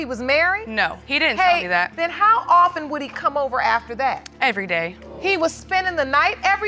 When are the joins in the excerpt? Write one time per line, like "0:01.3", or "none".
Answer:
0:01.0
0:01.9
0:05.0